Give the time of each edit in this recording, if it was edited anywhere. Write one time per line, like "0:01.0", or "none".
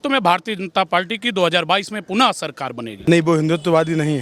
0:02.8